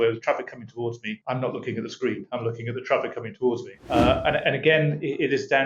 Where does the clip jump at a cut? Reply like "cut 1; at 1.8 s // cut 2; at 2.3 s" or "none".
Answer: cut 1; at 3.7 s

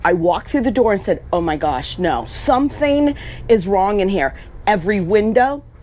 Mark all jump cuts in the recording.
none

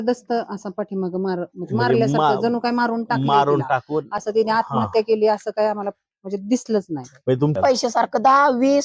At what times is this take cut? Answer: cut 1; at 7.6 s

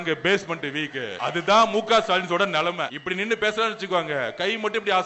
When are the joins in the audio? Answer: cut 1; at 1.1 s // cut 2; at 3.0 s

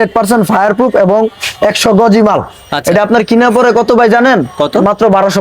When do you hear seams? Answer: none

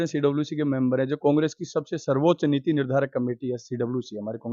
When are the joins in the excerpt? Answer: none

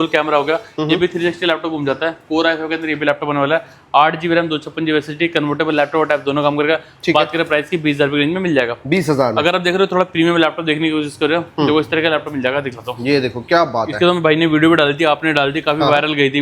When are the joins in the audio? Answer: none

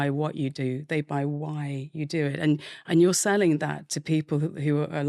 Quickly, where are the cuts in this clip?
none

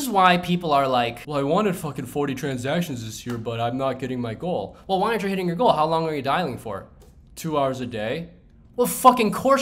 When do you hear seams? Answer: cut 1; at 1.2 s

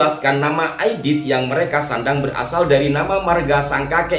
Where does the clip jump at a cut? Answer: none

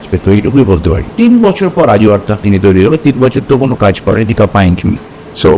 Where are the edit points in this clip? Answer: cut 1; at 1.1 s

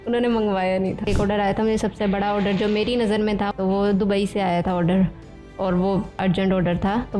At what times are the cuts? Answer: cut 1; at 1.1 s // cut 2; at 3.5 s // cut 3; at 6.2 s

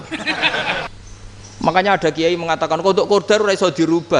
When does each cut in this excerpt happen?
cut 1; at 0.9 s

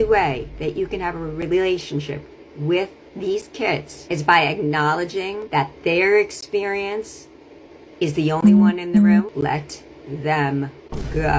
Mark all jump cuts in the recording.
cut 1; at 3.9 s // cut 2; at 5.4 s // cut 3; at 9.3 s

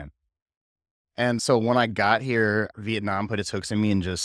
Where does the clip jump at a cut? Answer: cut 1; at 1.4 s // cut 2; at 2.7 s

